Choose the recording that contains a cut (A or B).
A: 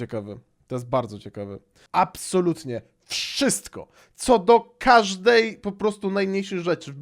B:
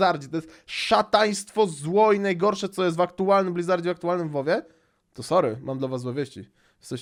A